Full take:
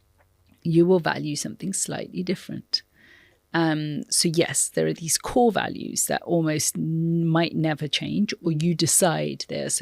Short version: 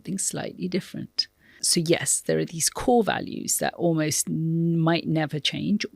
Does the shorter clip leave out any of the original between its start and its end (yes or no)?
yes